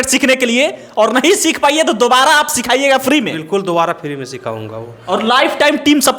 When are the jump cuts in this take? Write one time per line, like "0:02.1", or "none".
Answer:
none